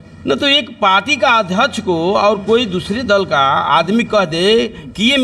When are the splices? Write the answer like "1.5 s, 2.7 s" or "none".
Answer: none